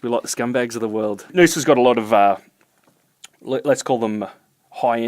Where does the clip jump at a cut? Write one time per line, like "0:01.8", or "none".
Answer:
0:01.3